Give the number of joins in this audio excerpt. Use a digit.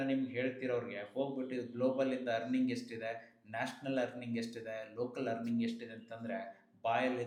0